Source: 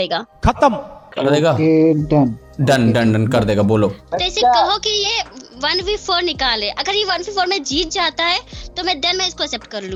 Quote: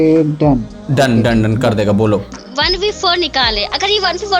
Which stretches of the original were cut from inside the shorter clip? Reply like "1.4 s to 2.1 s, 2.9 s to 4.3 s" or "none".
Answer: 4.0 s to 5.4 s